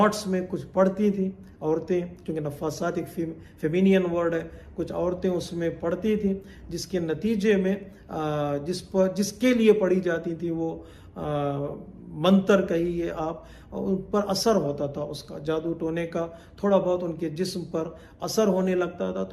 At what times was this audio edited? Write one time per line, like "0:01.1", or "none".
none